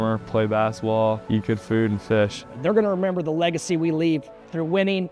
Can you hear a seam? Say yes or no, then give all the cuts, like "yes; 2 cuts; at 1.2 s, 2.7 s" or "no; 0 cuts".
yes; 2 cuts; at 1.2 s, 2.5 s